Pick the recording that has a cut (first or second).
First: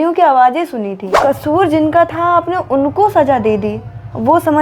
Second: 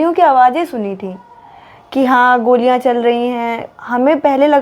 first